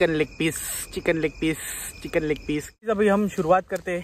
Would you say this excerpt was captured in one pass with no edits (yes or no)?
no